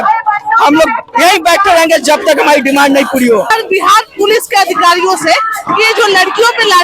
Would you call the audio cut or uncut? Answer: cut